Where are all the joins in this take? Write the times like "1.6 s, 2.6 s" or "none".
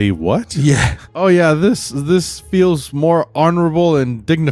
1.1 s